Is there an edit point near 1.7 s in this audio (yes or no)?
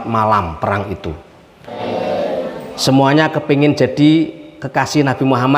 yes